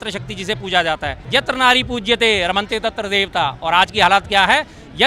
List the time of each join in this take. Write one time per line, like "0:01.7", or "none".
0:01.1